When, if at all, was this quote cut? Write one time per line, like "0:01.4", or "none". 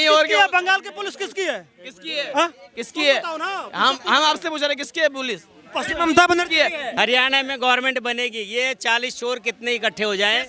0:06.8